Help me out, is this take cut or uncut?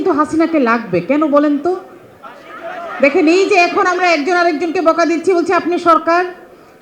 uncut